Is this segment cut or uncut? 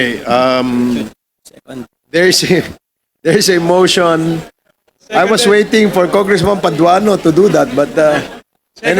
uncut